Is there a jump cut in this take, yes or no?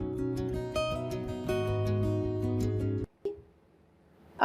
yes